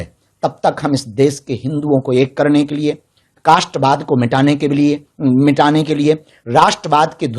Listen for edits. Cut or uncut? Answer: uncut